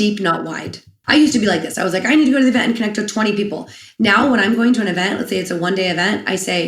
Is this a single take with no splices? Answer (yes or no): no